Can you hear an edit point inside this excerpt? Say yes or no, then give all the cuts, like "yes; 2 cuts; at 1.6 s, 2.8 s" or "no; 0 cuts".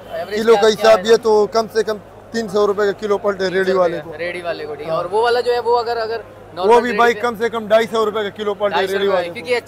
no; 0 cuts